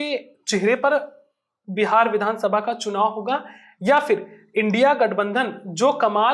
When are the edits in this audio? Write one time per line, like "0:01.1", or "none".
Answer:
none